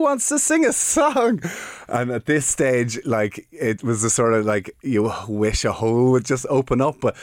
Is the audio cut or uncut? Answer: uncut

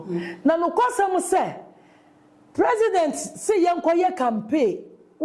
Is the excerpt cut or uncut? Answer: uncut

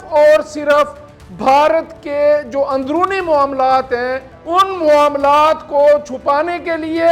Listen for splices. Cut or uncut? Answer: cut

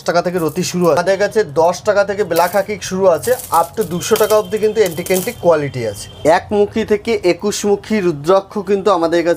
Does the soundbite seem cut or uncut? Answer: cut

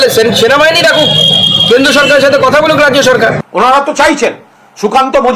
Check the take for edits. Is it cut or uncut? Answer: cut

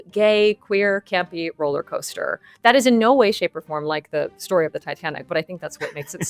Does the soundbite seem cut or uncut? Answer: uncut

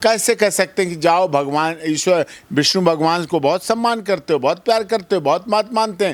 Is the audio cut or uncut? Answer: uncut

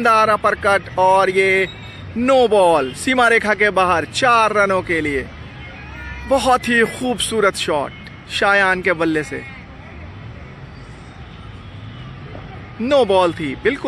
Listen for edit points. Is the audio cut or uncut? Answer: uncut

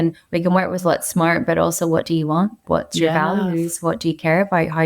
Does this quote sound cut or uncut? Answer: cut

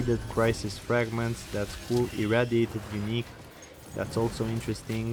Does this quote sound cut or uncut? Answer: uncut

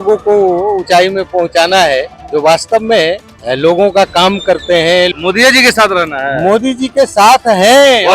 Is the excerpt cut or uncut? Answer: cut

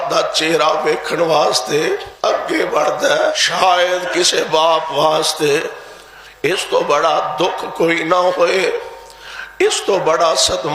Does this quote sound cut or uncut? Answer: cut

